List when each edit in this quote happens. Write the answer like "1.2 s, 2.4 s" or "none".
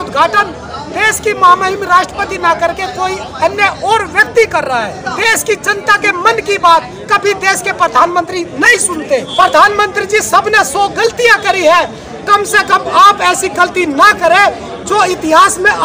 5.0 s, 9.3 s